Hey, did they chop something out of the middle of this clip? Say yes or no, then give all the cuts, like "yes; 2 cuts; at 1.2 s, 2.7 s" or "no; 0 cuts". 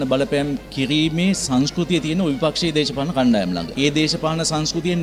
no; 0 cuts